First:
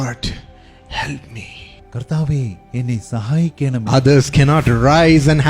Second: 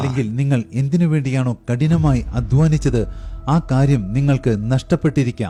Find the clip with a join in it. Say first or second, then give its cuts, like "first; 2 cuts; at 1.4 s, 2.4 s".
first; 1 cut; at 3.9 s